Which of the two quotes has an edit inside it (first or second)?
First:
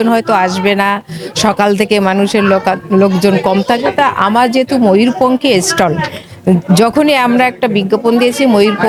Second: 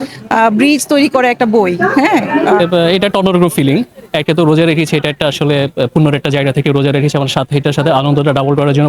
second